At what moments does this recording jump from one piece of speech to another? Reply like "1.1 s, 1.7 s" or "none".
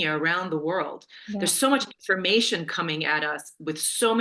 none